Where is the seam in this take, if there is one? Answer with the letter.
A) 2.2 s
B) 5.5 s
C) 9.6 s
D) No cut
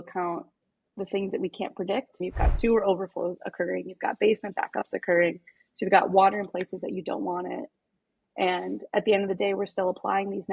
A